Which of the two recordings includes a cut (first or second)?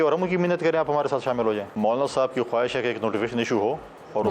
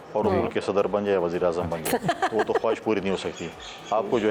first